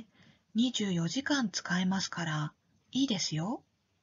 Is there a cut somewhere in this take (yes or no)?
yes